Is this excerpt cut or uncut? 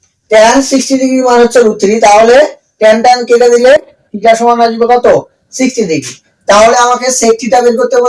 uncut